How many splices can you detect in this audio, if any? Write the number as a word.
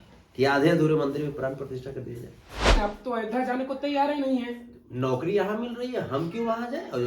one